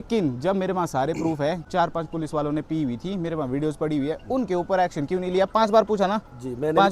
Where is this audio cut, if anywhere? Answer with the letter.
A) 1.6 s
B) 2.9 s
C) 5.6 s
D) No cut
A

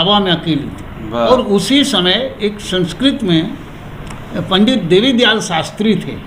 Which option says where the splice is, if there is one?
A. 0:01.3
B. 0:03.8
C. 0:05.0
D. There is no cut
A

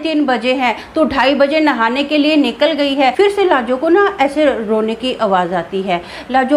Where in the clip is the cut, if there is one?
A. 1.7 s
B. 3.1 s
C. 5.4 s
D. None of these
B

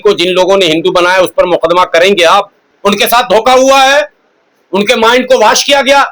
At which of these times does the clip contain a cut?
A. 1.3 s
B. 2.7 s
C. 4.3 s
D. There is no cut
B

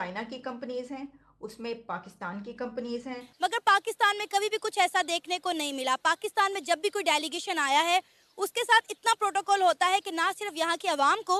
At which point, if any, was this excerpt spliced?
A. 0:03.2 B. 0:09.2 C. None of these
A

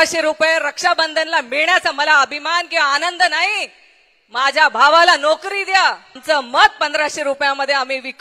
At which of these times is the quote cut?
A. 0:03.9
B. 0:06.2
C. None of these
B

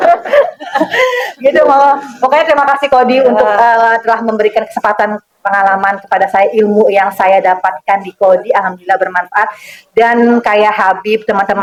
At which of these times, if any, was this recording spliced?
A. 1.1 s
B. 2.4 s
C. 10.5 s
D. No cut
D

